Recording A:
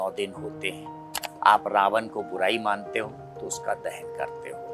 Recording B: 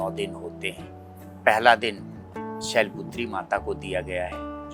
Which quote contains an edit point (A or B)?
A